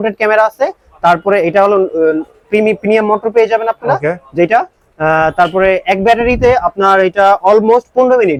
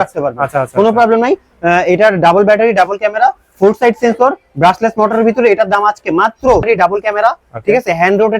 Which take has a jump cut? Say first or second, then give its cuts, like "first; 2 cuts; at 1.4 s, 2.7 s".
second; 1 cut; at 6.6 s